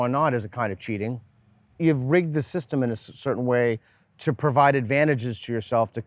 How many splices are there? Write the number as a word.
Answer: one